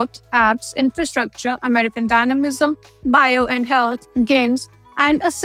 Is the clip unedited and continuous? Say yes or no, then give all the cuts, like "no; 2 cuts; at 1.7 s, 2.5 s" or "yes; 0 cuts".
yes; 0 cuts